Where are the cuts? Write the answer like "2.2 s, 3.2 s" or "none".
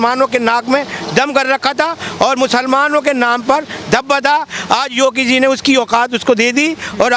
none